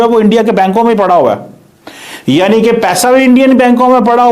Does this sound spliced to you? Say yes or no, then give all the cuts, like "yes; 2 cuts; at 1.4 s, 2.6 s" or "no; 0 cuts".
no; 0 cuts